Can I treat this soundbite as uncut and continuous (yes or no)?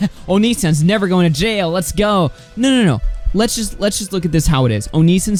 yes